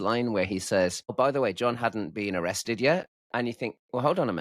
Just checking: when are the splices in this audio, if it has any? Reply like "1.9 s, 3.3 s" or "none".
1.1 s, 3.2 s